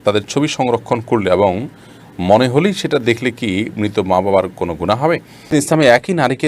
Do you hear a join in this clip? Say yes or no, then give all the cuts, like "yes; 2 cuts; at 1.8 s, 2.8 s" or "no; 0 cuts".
yes; 1 cut; at 5.4 s